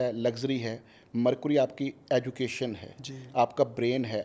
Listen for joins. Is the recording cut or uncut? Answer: uncut